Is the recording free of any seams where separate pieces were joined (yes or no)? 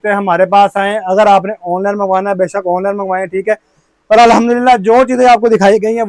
yes